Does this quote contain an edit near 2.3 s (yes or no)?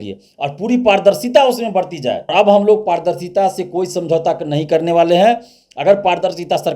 yes